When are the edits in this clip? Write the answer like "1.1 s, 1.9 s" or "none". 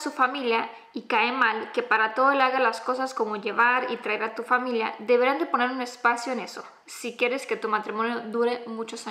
none